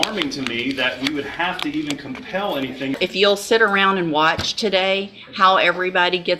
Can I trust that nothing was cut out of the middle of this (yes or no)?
no